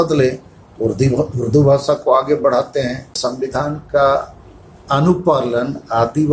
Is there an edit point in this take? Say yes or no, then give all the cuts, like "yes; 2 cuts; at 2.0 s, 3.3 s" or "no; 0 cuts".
yes; 1 cut; at 3.2 s